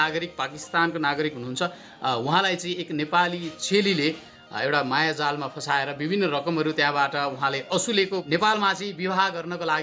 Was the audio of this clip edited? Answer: yes; 1 cut; at 8.2 s

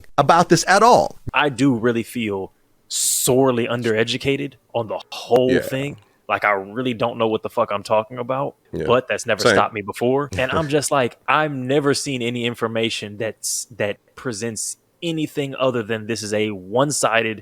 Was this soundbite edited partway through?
yes; 3 cuts; at 1.2 s, 10.3 s, 14.9 s

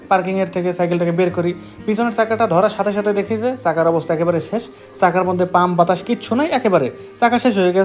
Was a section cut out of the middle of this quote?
no; 0 cuts

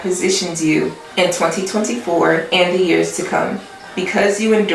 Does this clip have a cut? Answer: yes; 2 cuts; at 1.0 s, 2.5 s

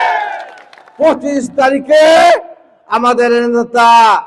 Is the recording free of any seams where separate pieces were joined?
yes; 0 cuts

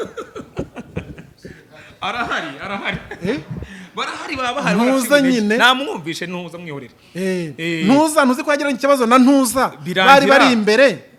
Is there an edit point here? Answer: no; 0 cuts

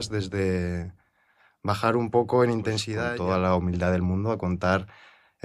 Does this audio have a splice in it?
yes; 1 cut; at 2.9 s

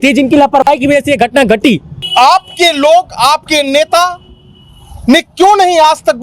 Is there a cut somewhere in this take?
yes; 1 cut; at 2.0 s

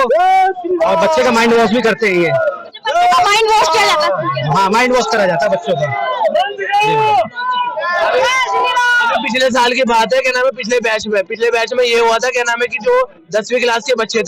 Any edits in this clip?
no; 0 cuts

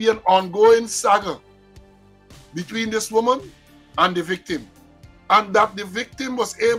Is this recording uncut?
yes; 0 cuts

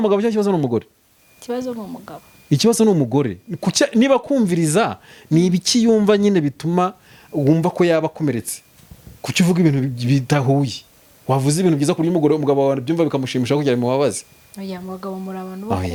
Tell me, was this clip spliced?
no; 0 cuts

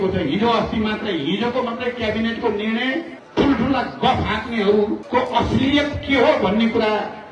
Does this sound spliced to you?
yes; 2 cuts; at 3.2 s, 5.0 s

